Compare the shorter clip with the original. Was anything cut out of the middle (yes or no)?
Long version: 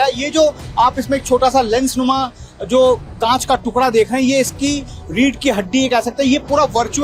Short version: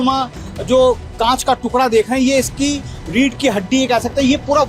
no